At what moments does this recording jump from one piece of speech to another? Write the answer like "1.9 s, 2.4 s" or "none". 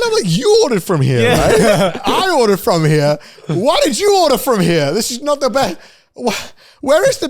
none